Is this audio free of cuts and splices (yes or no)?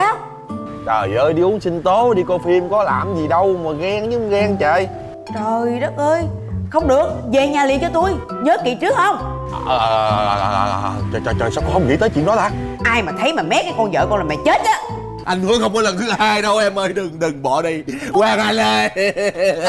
no